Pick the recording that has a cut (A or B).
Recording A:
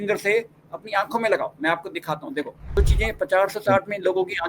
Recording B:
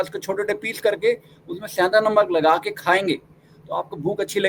A